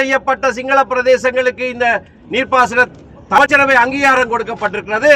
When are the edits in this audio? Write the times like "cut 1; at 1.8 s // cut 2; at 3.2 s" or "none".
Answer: cut 1; at 3.4 s